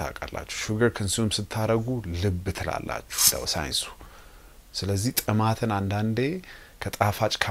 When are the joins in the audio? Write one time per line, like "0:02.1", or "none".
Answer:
0:03.3